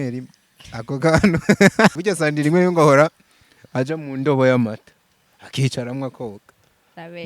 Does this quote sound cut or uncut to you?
cut